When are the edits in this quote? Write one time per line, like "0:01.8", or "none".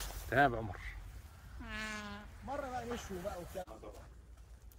0:03.6